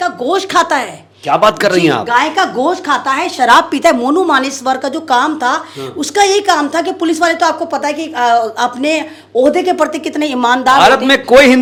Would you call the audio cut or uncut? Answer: uncut